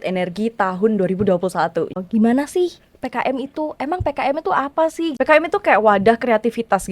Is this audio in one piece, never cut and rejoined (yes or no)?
no